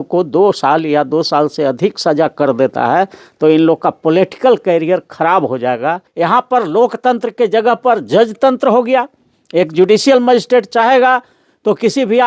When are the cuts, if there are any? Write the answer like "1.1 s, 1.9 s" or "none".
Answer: 6.1 s